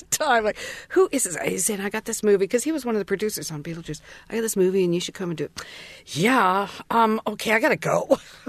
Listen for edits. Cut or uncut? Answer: uncut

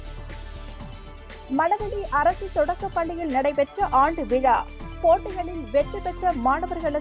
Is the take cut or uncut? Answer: cut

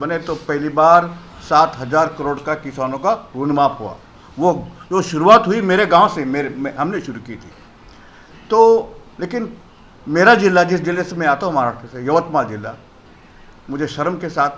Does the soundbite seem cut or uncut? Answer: uncut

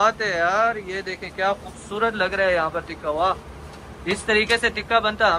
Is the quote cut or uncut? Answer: uncut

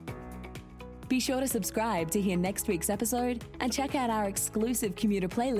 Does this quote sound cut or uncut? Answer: cut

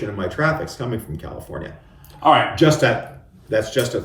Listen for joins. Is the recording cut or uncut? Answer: uncut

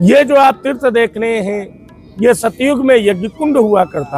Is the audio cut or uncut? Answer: uncut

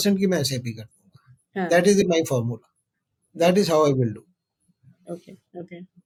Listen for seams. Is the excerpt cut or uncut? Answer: uncut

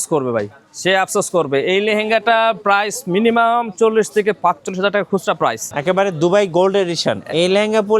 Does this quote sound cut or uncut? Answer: cut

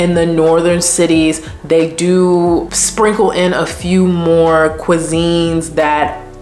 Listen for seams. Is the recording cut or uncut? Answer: uncut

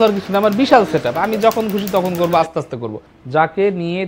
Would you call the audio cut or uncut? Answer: cut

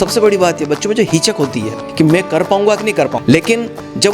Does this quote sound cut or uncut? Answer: cut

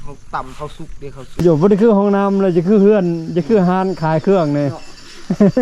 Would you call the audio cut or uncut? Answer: cut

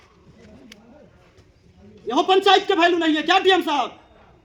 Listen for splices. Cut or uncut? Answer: uncut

